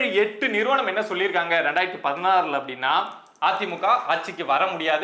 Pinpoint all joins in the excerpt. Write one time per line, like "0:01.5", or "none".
none